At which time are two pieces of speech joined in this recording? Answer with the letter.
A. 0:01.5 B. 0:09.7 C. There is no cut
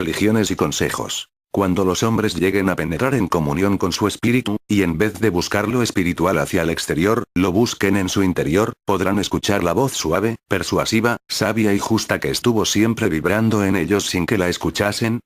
B